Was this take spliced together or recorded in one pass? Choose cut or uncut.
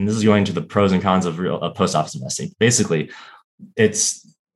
uncut